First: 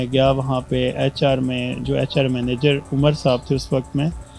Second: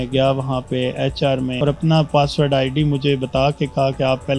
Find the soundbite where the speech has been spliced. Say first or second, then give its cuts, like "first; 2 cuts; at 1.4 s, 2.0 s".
second; 1 cut; at 1.6 s